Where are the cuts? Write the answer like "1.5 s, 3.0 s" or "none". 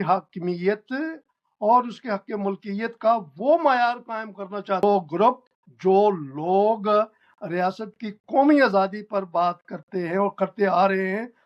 4.8 s